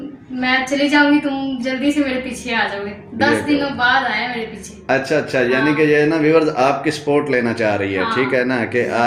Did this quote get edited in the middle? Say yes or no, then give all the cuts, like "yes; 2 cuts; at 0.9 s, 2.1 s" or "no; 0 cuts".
no; 0 cuts